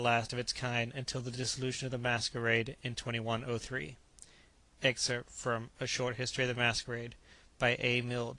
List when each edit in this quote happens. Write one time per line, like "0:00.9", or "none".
none